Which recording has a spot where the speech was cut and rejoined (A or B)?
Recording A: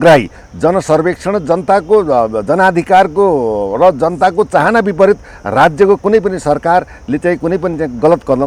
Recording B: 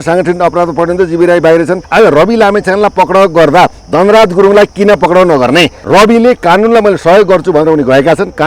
B